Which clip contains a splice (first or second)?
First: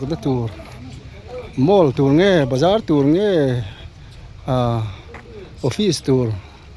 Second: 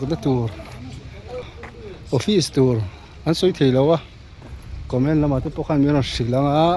second